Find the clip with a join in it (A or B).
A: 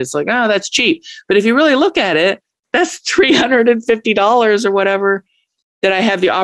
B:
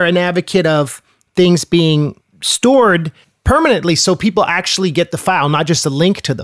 A